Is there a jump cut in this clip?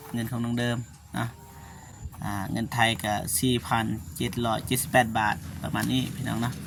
no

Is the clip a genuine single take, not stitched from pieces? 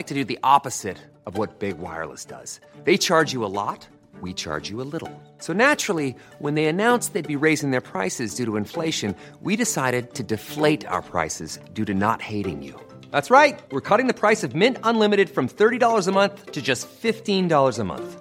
yes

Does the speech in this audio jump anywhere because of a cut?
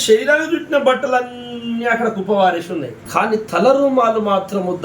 yes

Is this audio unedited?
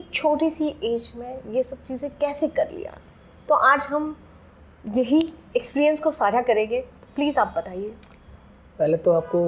yes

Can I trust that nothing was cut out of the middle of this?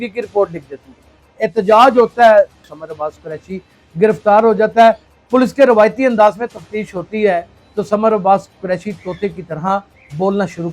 no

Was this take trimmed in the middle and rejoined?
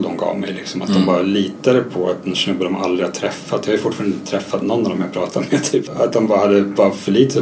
yes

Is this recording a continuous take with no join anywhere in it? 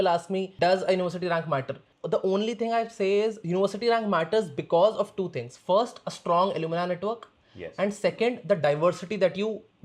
yes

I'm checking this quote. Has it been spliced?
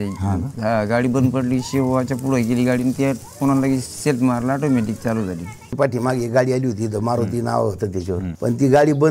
yes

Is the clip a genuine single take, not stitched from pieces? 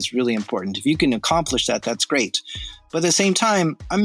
yes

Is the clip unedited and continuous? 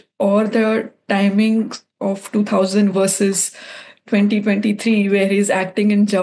yes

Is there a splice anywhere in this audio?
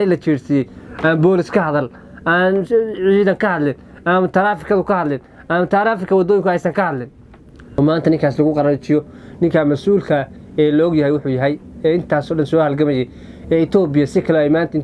yes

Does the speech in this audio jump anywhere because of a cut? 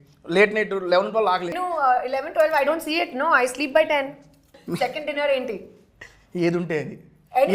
yes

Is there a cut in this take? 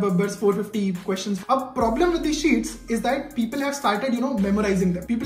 yes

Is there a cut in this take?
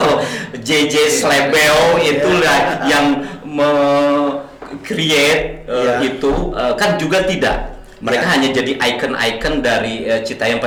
no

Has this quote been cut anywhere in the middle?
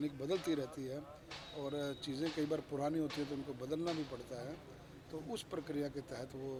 no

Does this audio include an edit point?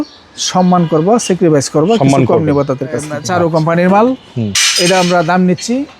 yes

